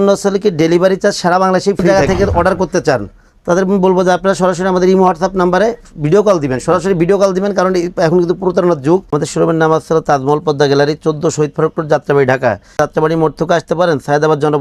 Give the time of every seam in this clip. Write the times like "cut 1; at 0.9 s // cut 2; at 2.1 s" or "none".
cut 1; at 1.8 s // cut 2; at 9.1 s // cut 3; at 12.8 s